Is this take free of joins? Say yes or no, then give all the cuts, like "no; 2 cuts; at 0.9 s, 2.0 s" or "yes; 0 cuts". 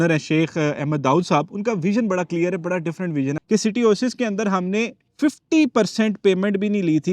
no; 1 cut; at 3.4 s